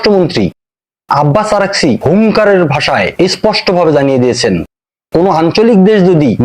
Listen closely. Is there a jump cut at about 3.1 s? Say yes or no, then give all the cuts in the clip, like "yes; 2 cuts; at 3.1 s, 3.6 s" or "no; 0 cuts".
yes; 2 cuts; at 2.0 s, 3.1 s